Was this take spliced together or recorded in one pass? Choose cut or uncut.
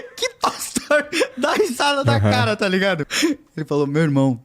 cut